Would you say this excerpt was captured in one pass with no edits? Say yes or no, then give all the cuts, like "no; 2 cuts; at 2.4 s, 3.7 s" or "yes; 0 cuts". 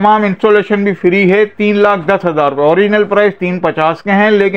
yes; 0 cuts